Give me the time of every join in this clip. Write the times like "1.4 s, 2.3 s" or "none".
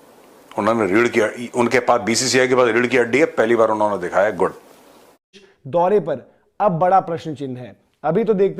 5.3 s